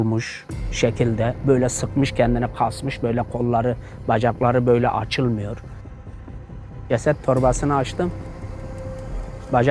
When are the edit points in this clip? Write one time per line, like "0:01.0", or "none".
0:06.1